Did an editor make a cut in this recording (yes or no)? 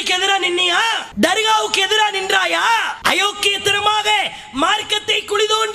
no